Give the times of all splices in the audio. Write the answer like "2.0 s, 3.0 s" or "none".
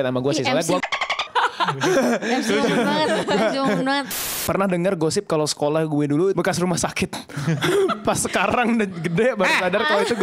4.3 s, 6.3 s